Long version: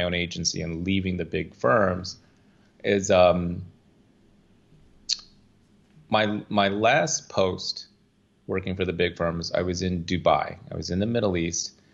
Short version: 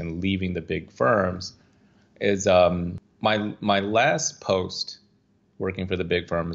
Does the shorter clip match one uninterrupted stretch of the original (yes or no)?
no